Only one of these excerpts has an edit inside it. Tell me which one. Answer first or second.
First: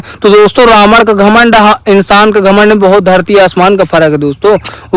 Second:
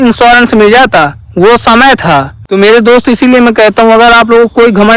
second